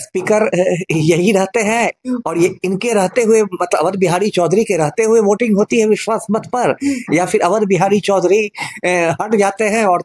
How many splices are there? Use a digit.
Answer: 0